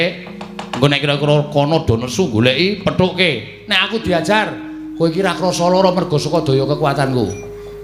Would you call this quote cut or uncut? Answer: uncut